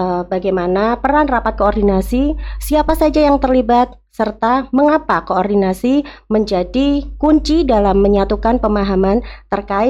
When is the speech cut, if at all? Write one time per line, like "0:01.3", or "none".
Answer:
none

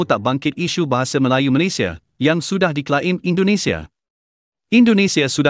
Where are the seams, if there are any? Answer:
none

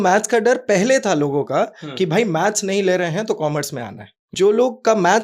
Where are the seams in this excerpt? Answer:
0:04.3

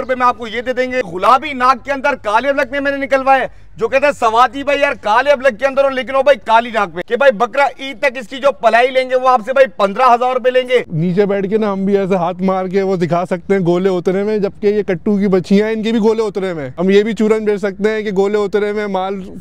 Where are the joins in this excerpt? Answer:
0:01.0
0:07.0
0:10.9
0:16.7

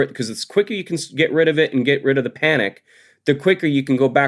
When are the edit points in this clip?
none

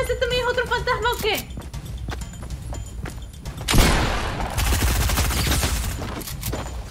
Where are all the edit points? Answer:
0:02.4

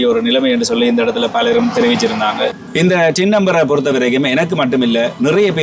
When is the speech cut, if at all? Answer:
0:02.6

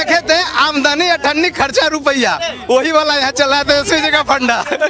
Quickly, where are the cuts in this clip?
none

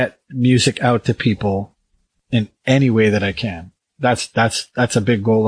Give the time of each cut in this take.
0:02.2

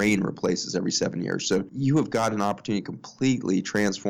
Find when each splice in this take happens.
0:01.7

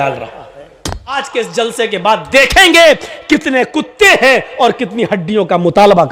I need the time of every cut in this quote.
0:01.1

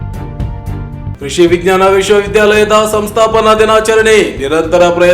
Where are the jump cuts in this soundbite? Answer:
0:01.1

